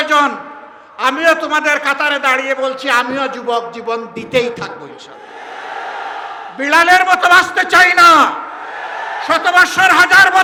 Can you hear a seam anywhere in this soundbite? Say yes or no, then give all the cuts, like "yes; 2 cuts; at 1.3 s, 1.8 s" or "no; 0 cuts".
no; 0 cuts